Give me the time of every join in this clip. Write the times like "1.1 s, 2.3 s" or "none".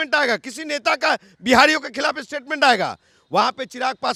none